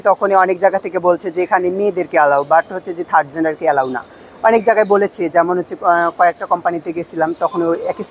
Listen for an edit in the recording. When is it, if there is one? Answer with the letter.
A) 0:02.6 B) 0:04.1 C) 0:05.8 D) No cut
D